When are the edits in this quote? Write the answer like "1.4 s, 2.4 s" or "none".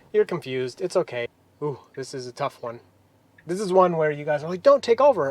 1.4 s